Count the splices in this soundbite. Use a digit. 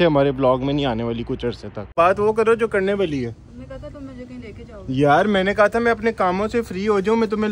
1